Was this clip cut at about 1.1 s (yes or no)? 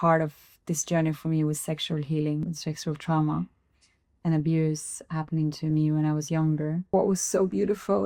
no